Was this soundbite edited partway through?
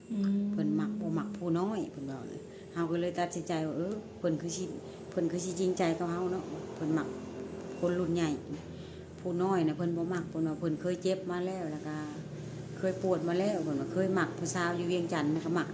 no; 0 cuts

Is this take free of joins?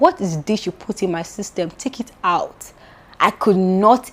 yes; 0 cuts

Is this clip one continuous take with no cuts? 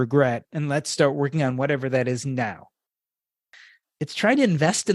no; 1 cut; at 3.4 s

